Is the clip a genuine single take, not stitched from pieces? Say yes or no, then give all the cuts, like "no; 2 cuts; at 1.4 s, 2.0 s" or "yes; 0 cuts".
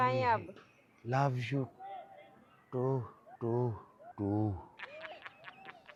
yes; 0 cuts